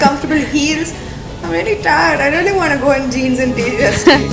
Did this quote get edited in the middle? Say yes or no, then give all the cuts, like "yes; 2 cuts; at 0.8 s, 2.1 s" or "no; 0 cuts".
no; 0 cuts